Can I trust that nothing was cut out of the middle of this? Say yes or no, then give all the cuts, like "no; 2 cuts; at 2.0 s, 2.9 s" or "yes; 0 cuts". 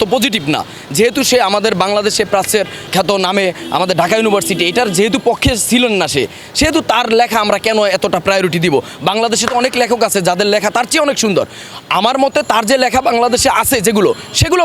no; 1 cut; at 2.9 s